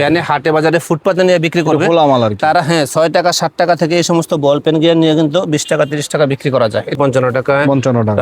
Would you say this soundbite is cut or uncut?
cut